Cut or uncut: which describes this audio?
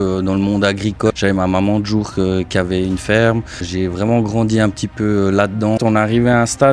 cut